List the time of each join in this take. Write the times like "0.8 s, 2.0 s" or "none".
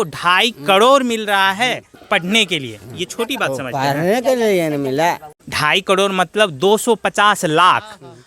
5.3 s